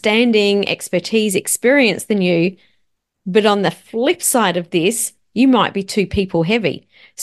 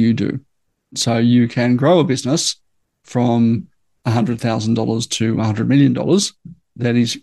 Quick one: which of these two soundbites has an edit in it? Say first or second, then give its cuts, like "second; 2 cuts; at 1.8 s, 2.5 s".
second; 1 cut; at 1.0 s